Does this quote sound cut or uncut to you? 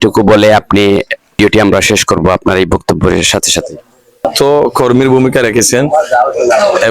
cut